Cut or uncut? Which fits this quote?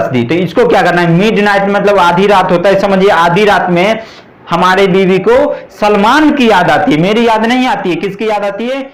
uncut